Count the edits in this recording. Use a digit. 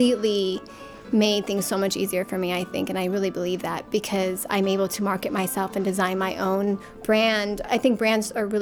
1